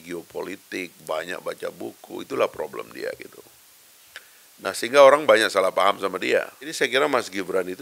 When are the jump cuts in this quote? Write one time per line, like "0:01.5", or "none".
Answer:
0:06.7

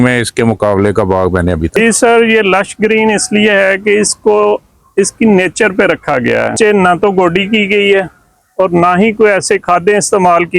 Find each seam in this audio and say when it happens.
0:01.8
0:06.5

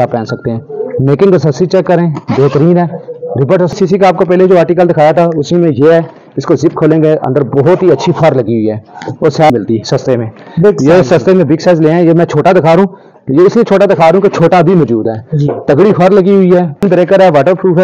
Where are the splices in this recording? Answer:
0:03.8
0:09.5
0:16.8

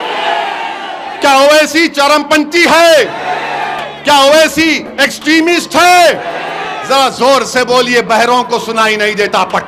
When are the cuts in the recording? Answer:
none

